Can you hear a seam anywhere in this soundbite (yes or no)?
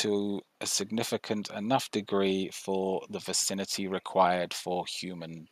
no